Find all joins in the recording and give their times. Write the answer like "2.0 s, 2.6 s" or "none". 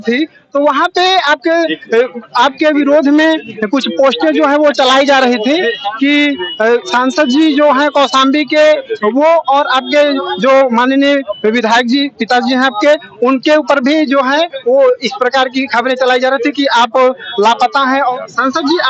18.0 s